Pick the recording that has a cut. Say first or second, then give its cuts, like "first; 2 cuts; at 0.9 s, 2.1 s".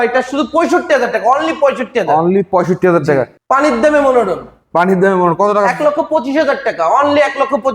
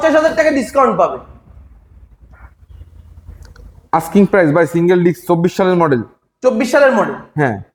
first; 1 cut; at 3.4 s